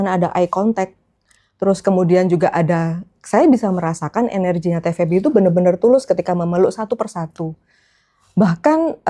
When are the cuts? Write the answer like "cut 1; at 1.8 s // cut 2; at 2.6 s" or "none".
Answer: none

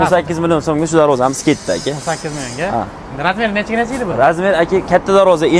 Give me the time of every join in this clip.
none

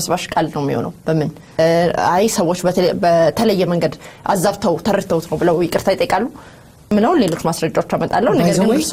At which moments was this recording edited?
cut 1; at 1.6 s // cut 2; at 6.9 s

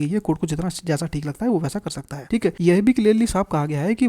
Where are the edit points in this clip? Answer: cut 1; at 2.4 s

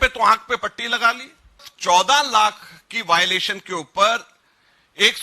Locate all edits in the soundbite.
cut 1; at 1.7 s

